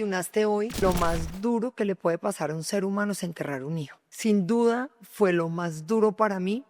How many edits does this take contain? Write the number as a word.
two